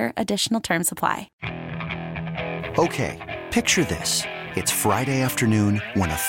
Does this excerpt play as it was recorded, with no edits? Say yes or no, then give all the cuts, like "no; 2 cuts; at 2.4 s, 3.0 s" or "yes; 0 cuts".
no; 1 cut; at 1.3 s